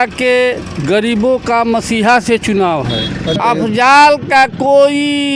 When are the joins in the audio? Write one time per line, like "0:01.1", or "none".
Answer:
0:03.4